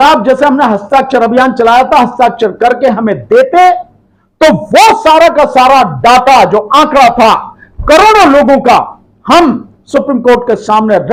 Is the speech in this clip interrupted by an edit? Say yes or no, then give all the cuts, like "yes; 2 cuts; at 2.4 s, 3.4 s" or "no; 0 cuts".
no; 0 cuts